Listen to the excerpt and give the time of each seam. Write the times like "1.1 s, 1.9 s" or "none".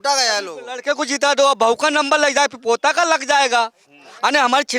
none